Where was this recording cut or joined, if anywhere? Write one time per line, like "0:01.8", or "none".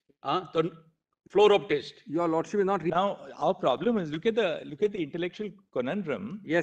0:02.9